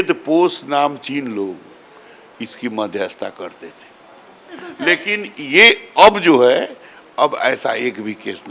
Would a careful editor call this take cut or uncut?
uncut